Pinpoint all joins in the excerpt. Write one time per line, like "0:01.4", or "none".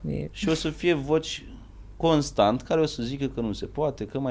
none